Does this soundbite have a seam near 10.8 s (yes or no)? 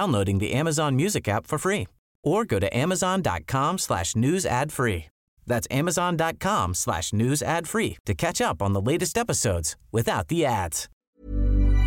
yes